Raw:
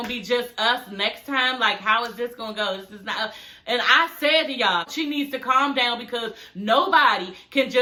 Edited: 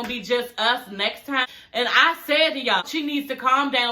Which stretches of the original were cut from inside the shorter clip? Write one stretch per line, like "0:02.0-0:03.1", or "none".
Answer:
0:01.5-0:03.4
0:04.7-0:04.8